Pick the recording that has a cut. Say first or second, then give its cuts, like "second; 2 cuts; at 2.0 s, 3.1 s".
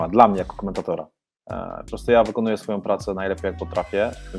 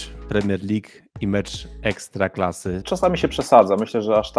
second; 1 cut; at 2.8 s